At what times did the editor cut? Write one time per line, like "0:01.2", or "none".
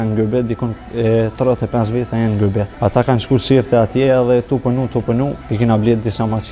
0:02.7
0:05.4

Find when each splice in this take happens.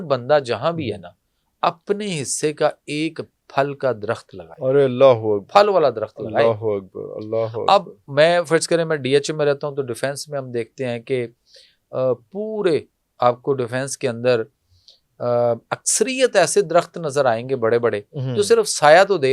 none

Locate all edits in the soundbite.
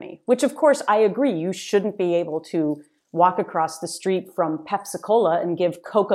none

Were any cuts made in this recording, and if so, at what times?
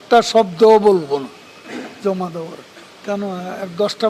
0:02.9

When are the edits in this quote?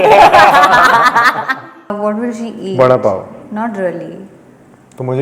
0:01.9

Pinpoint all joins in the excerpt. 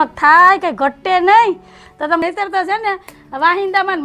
0:02.2

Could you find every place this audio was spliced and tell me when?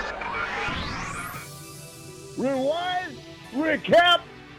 none

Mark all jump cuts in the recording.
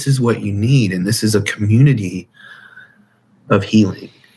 none

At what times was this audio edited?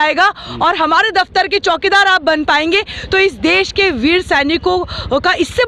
none

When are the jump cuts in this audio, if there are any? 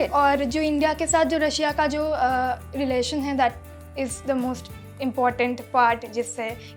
none

